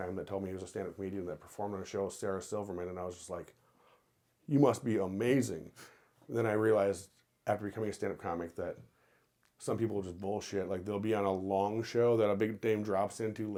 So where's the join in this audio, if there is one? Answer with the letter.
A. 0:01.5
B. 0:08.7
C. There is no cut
C